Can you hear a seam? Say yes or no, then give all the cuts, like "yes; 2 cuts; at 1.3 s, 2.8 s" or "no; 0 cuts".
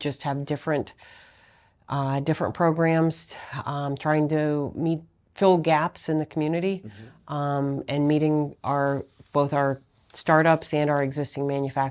no; 0 cuts